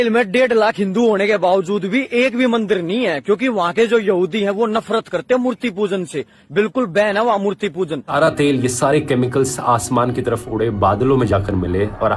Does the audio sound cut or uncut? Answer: cut